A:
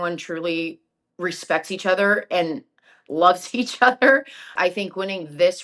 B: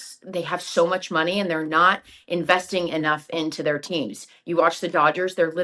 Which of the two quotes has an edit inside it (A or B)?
A